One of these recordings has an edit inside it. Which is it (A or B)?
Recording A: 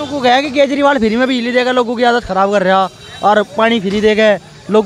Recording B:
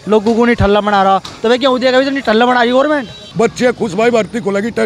B